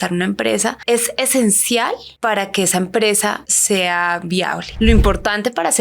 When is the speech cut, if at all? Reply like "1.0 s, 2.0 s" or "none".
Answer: 0.8 s, 2.1 s, 3.5 s, 4.6 s